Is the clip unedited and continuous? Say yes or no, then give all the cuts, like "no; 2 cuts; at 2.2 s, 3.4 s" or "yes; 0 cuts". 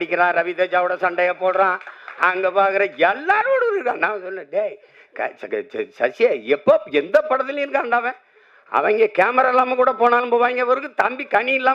yes; 0 cuts